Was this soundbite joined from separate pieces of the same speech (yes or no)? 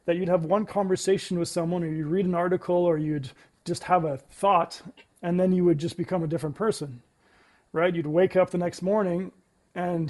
no